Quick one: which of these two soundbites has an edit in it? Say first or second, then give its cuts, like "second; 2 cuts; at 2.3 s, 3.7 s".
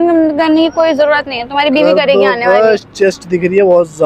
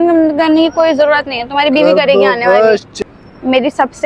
second; 1 cut; at 2.9 s